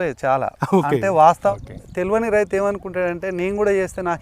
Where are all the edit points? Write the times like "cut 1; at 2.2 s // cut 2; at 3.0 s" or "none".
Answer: cut 1; at 1.5 s

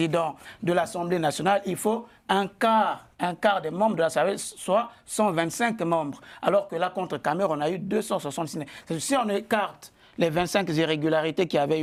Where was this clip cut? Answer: none

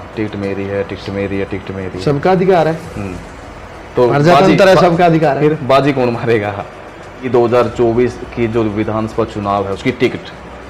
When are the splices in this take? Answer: cut 1; at 7.2 s

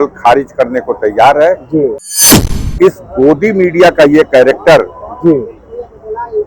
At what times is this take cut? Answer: cut 1; at 2.1 s

